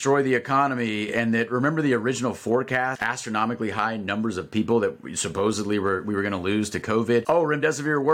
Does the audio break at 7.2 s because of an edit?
yes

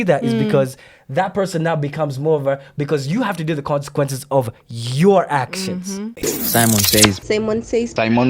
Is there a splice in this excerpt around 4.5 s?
no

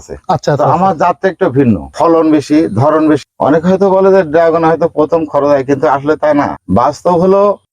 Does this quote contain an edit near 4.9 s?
no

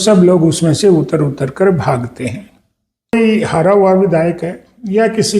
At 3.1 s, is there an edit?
yes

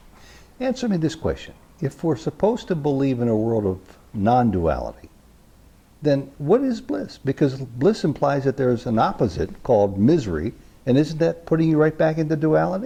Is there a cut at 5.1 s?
no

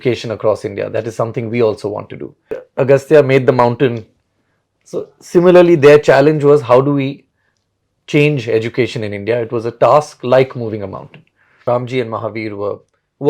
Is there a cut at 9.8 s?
no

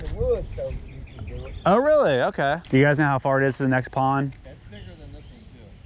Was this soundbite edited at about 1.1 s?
no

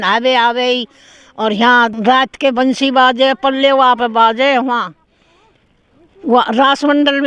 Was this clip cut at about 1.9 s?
yes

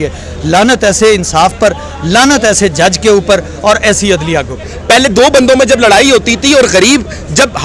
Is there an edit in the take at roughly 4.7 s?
yes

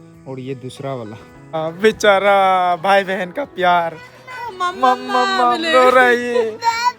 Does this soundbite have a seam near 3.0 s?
no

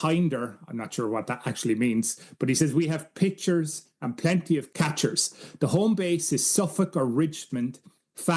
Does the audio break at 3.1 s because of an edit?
no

